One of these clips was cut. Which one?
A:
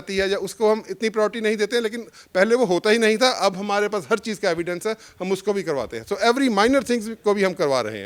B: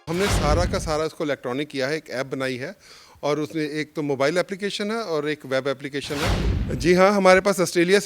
B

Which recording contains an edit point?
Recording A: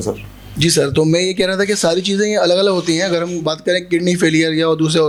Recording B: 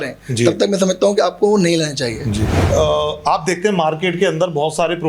B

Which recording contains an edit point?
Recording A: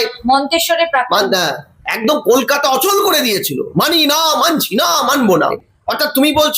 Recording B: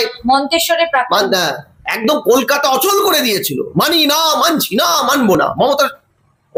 A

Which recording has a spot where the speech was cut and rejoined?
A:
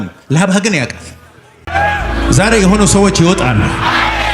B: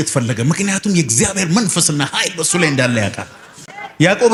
A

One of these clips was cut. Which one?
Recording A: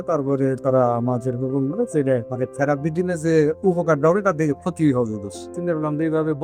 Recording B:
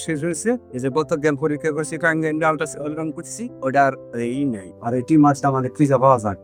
A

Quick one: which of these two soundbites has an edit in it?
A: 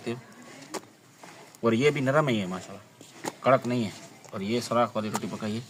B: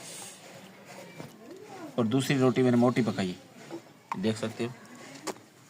B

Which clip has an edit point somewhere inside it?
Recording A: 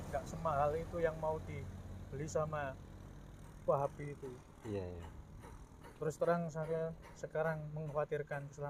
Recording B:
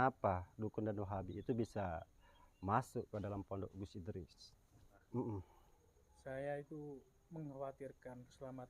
B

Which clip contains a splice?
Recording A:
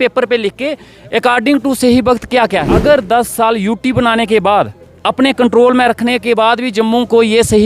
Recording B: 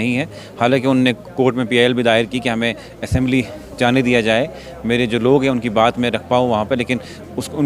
A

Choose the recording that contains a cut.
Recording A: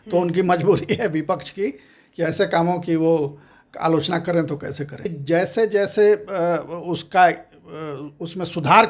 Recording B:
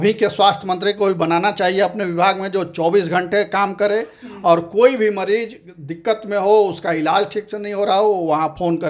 A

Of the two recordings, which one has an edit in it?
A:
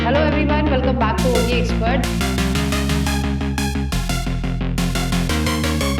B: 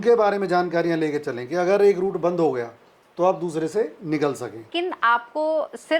B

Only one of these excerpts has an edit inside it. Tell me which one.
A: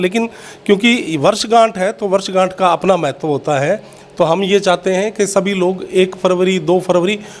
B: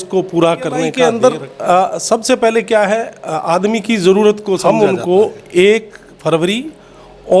B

